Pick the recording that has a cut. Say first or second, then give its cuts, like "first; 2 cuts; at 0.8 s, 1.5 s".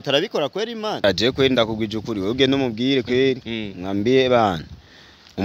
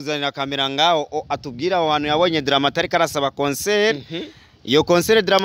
first; 1 cut; at 1.0 s